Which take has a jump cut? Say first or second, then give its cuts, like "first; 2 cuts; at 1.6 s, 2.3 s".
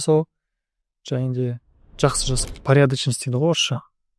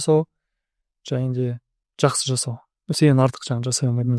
first; 1 cut; at 2.5 s